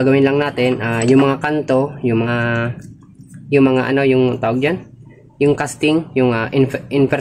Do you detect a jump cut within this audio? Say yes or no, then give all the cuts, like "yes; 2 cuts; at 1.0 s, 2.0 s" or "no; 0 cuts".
yes; 1 cut; at 2.3 s